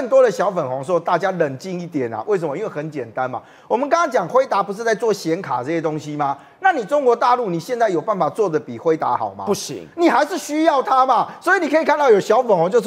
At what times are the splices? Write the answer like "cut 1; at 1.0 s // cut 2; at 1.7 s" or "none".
none